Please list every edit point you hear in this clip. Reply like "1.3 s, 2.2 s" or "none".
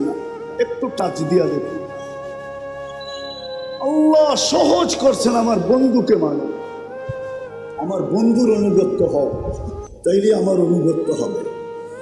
6.5 s, 7.8 s